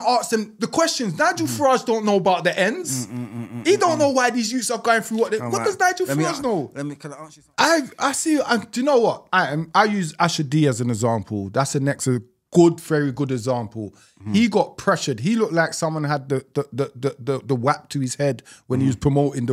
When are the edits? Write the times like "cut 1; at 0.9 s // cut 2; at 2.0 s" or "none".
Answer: cut 1; at 7.0 s